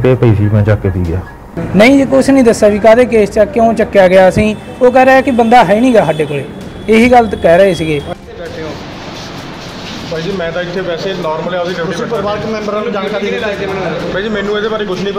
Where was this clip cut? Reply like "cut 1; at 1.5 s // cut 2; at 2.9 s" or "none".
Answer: cut 1; at 1.6 s // cut 2; at 8.1 s